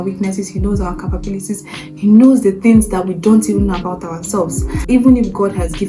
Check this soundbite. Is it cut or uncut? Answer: cut